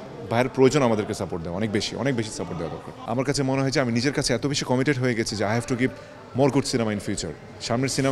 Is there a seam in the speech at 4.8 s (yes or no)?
no